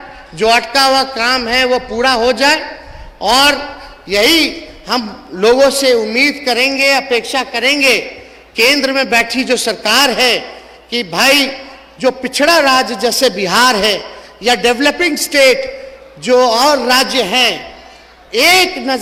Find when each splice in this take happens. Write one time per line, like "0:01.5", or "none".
none